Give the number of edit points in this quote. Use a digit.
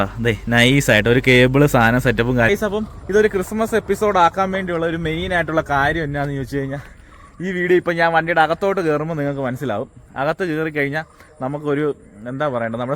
1